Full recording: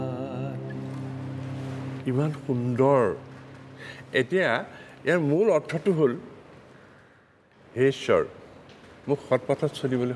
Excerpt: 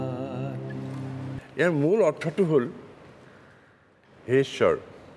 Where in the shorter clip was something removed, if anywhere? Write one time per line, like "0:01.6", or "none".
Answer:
0:01.4